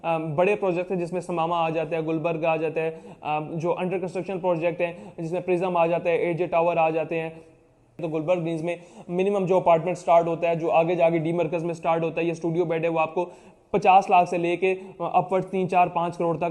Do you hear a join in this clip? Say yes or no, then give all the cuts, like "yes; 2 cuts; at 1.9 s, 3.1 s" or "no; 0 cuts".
yes; 1 cut; at 8.0 s